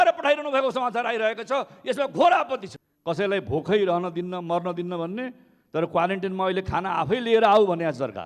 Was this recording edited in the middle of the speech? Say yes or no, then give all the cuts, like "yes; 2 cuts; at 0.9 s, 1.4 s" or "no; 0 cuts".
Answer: yes; 1 cut; at 2.7 s